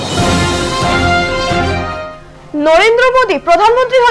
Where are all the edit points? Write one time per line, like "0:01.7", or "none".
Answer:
0:01.6